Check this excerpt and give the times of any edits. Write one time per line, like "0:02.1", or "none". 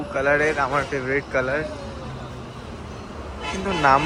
none